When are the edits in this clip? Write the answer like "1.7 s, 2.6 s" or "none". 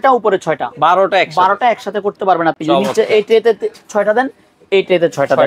none